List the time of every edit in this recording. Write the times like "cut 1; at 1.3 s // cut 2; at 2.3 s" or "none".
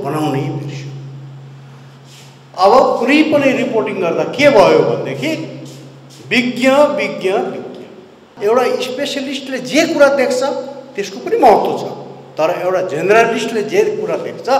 cut 1; at 8.3 s